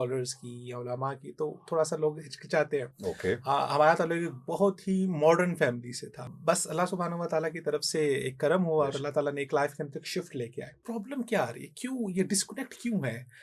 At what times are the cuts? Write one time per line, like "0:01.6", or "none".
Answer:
0:02.9
0:06.3
0:10.8